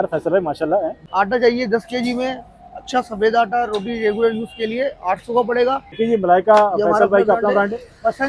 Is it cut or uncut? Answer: cut